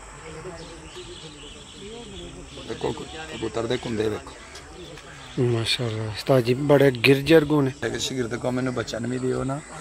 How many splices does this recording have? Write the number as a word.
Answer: one